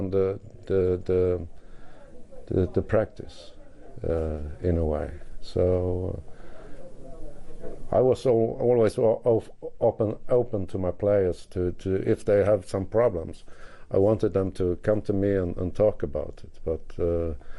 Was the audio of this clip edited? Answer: yes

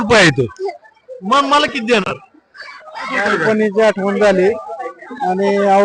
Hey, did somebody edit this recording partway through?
yes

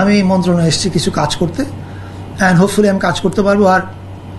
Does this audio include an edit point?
no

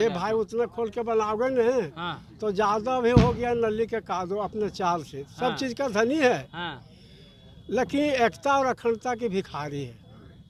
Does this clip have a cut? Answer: no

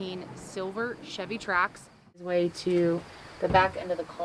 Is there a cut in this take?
yes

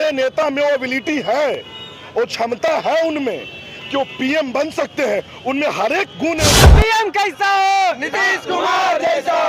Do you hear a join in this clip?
yes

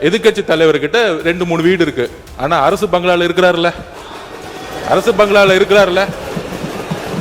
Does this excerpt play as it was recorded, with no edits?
yes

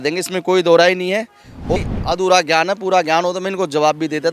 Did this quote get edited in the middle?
yes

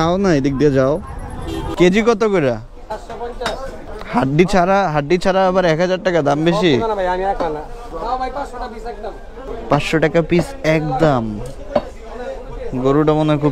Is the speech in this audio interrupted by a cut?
yes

